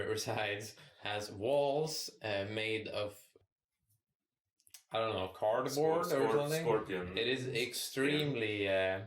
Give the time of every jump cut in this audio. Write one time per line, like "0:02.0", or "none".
0:03.4